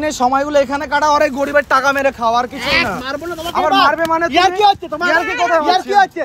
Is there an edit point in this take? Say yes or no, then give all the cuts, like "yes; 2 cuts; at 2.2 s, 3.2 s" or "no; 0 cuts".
no; 0 cuts